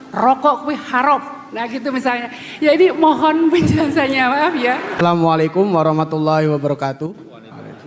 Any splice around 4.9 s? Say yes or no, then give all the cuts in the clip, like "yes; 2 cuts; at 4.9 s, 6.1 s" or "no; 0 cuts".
yes; 1 cut; at 4.9 s